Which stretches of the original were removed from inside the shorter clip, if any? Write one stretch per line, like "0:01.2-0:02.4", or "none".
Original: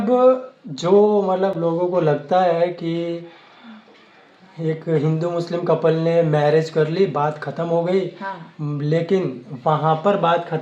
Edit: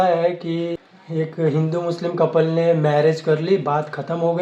0:03.3-0:04.4